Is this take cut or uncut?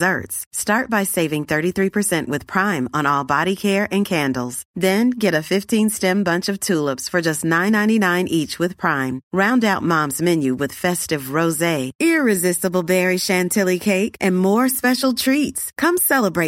uncut